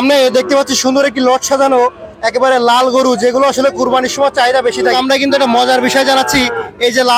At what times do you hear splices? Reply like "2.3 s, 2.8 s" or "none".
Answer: 4.9 s